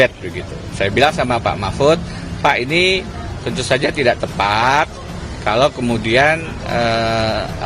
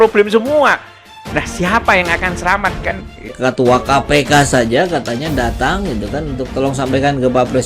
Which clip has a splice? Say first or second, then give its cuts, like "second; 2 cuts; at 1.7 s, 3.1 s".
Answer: second; 1 cut; at 3.3 s